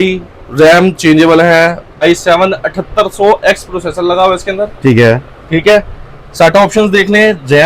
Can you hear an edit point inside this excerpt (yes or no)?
yes